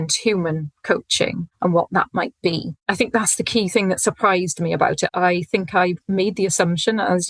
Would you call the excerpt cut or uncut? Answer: cut